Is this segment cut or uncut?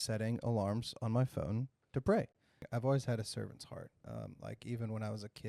cut